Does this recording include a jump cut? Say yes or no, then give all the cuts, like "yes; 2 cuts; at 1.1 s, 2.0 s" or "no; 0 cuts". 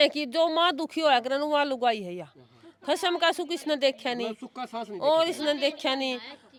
no; 0 cuts